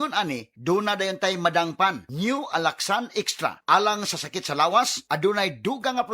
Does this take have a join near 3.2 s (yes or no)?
yes